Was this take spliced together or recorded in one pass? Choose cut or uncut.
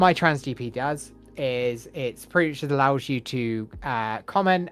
uncut